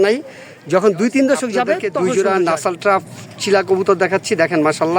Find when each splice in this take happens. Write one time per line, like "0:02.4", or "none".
0:01.4